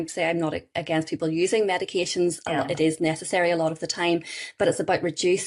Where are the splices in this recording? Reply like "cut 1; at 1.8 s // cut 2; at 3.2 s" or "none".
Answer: none